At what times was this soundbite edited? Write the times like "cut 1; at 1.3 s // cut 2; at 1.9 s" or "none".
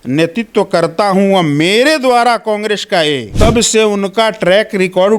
cut 1; at 3.3 s